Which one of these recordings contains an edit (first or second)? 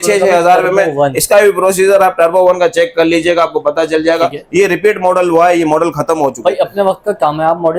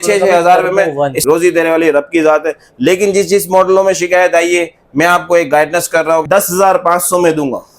second